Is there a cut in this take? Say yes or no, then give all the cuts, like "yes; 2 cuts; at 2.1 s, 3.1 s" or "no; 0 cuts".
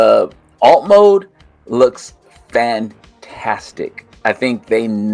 no; 0 cuts